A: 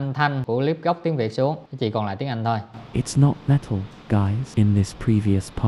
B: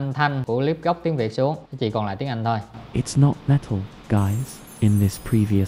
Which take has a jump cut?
A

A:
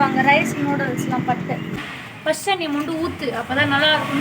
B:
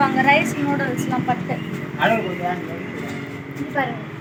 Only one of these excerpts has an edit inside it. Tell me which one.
A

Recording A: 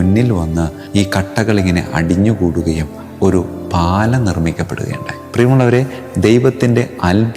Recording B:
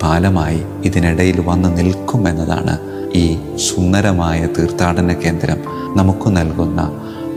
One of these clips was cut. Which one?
A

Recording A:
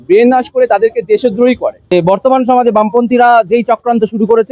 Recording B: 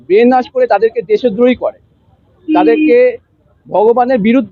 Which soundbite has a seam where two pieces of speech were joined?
A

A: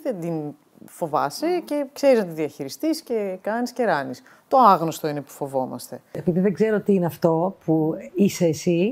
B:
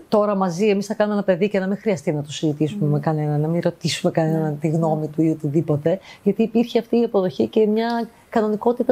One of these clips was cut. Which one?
A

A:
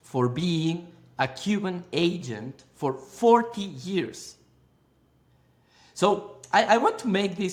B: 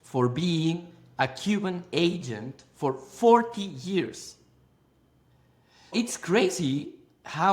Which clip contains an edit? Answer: B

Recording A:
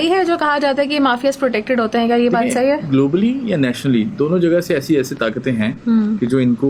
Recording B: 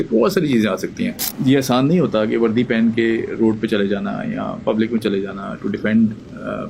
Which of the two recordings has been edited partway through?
B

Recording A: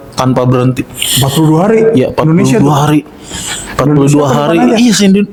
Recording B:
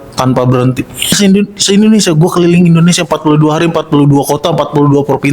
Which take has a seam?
B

